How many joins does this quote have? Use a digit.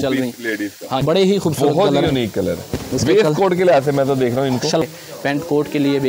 2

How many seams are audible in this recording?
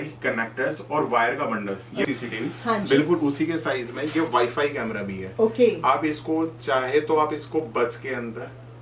1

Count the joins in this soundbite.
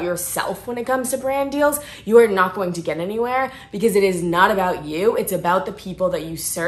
0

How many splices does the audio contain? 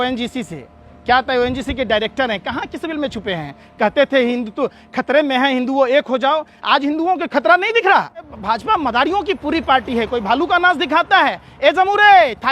1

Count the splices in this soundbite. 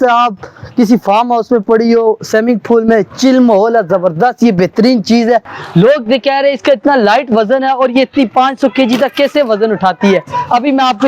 1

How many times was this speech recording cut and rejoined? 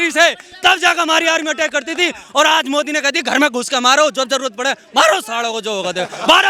0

